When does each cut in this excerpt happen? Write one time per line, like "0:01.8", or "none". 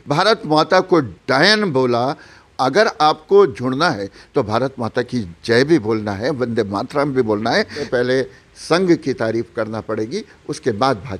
0:02.4
0:07.8